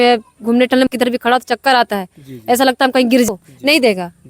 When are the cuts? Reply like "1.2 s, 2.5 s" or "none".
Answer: 0.9 s, 3.3 s